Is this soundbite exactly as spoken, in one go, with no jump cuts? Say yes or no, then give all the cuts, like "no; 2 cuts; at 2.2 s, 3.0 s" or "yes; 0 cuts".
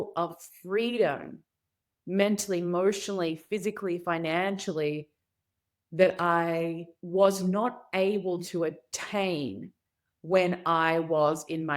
no; 1 cut; at 6.9 s